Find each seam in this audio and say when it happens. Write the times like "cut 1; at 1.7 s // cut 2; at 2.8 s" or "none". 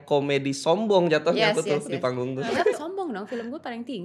cut 1; at 2.7 s